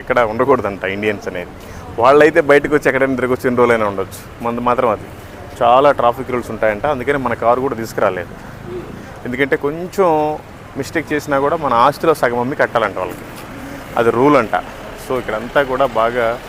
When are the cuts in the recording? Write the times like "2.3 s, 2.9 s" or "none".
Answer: none